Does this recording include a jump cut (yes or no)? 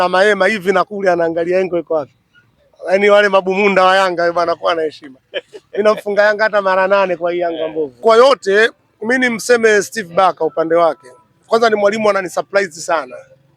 yes